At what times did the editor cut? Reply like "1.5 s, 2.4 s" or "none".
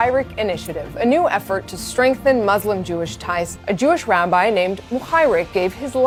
none